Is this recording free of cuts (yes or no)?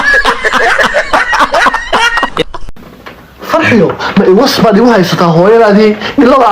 no